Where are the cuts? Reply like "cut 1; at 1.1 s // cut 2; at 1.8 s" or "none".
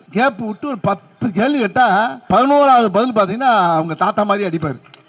cut 1; at 2.2 s